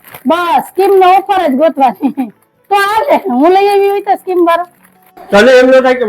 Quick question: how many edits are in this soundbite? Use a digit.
1